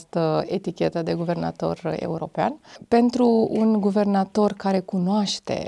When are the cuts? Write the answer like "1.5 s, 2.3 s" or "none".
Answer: 2.7 s